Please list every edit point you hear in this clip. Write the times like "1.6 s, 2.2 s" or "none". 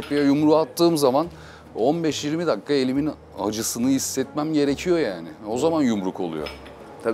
none